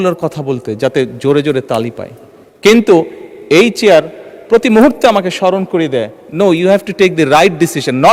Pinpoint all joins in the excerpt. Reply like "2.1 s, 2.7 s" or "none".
none